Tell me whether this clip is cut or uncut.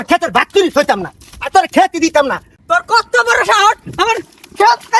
cut